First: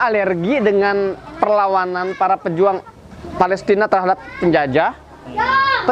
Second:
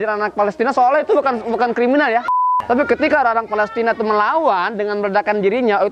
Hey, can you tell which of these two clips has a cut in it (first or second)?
second